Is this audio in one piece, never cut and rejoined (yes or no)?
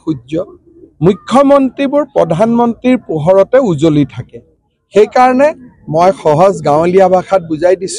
yes